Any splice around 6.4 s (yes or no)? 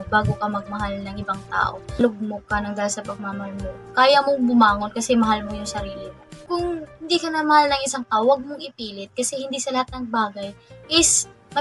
yes